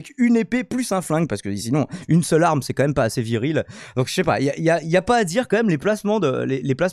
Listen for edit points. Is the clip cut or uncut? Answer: uncut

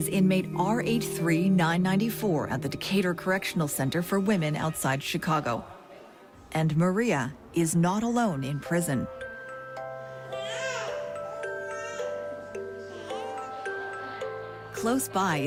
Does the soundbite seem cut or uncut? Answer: uncut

